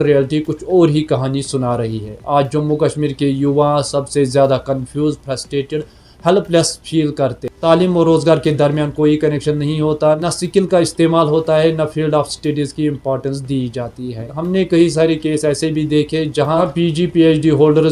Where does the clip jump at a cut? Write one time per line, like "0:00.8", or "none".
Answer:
0:07.5